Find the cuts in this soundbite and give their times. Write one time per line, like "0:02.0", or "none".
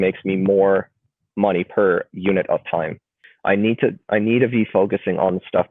0:03.2